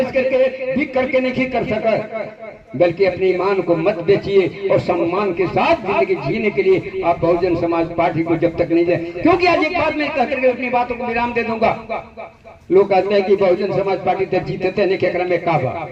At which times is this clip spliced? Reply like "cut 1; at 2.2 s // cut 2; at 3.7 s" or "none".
none